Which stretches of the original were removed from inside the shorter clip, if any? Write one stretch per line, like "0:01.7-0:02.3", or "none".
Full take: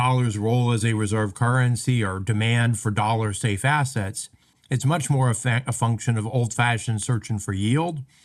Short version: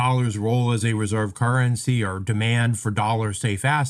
none